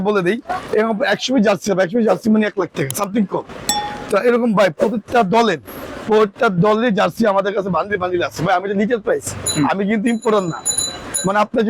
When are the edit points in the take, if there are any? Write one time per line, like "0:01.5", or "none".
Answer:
none